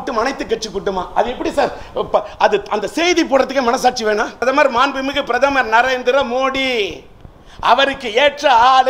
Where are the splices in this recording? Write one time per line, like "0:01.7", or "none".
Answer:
0:04.4

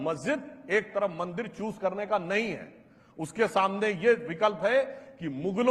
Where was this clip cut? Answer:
none

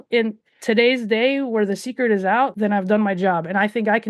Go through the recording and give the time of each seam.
0:02.5

